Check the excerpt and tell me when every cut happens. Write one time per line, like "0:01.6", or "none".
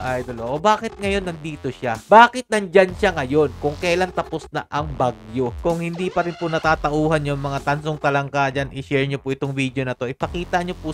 0:05.6